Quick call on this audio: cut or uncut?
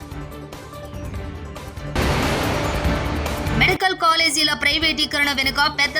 cut